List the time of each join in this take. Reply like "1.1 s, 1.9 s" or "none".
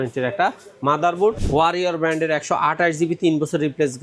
1.4 s